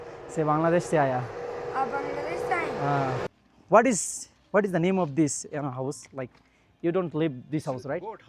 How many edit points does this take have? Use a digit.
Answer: 1